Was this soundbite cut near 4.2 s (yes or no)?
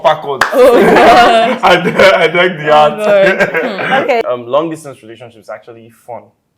yes